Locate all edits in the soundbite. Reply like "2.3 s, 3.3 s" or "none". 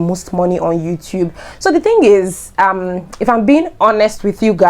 none